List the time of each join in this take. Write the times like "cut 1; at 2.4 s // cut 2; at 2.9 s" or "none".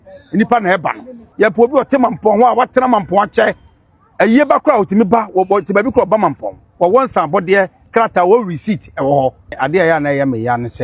cut 1; at 1.2 s // cut 2; at 9.6 s